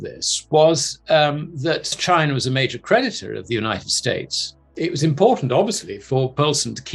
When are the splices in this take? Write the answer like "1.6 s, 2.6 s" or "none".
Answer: 2.0 s, 4.6 s